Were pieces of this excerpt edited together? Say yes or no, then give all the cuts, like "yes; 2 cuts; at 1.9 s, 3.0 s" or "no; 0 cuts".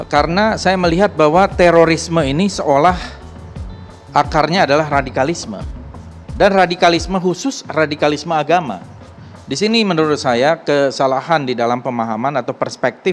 no; 0 cuts